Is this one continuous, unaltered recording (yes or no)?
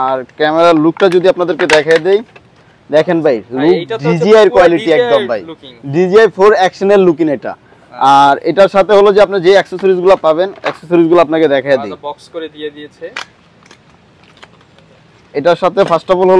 yes